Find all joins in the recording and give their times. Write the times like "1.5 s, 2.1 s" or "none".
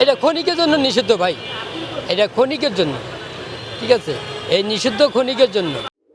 none